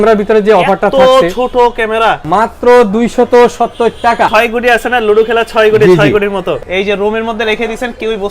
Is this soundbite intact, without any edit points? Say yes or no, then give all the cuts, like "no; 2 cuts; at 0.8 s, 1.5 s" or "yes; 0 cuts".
no; 3 cuts; at 2.2 s, 4.3 s, 6.6 s